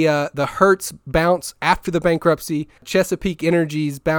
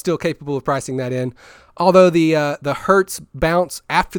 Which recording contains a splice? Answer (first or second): first